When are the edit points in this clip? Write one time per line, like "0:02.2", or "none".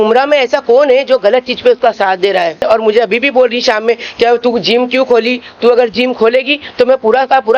0:02.7